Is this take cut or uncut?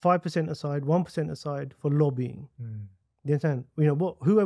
uncut